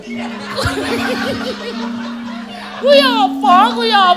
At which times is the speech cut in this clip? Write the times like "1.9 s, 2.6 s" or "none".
3.1 s